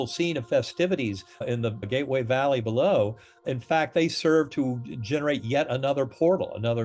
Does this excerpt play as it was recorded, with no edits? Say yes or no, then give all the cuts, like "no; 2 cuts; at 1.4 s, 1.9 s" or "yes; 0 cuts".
no; 2 cuts; at 1.5 s, 3.5 s